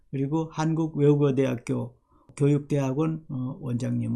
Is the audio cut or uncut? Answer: cut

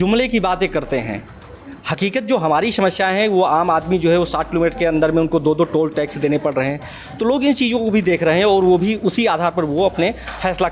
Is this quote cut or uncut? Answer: uncut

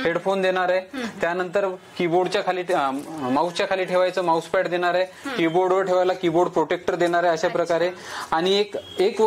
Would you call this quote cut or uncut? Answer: uncut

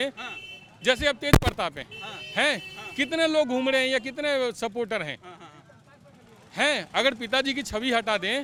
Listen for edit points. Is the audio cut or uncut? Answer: uncut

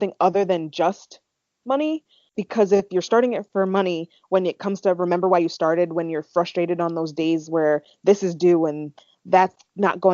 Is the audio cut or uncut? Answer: cut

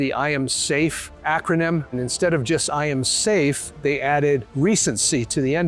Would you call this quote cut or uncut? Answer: cut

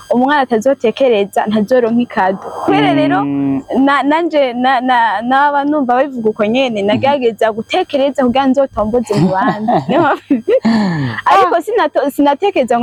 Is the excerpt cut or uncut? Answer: uncut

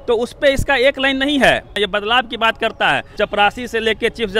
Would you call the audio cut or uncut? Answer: cut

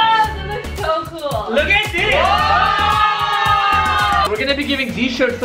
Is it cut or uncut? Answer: cut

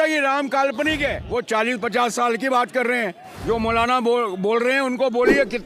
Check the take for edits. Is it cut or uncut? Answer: cut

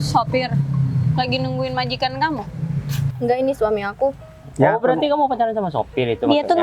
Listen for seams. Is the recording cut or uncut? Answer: cut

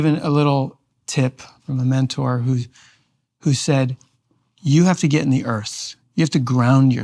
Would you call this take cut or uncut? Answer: cut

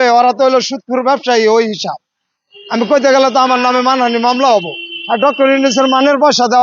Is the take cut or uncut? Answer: uncut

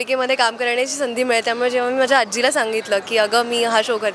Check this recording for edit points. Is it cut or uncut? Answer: uncut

